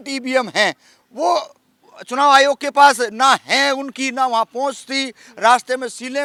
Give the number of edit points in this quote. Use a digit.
0